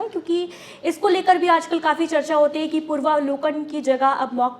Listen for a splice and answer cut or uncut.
uncut